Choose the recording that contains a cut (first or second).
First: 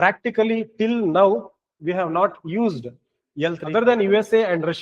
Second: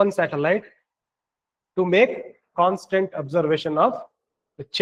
first